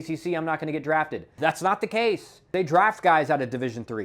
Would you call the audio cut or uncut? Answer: cut